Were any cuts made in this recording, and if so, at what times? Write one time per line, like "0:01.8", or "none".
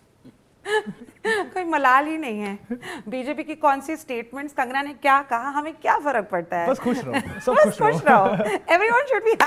none